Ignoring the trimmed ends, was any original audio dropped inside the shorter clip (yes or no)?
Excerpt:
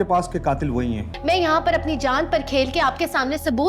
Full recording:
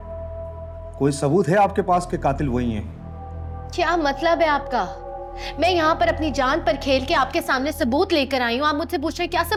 yes